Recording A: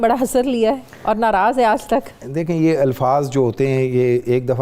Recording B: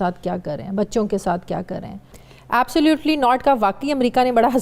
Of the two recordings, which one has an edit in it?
B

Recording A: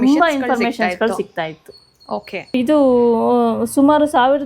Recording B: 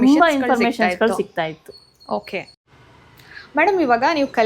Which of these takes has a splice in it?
A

